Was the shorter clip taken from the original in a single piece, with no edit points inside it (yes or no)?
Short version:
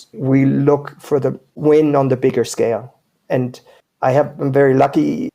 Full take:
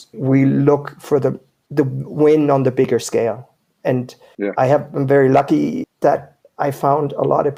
no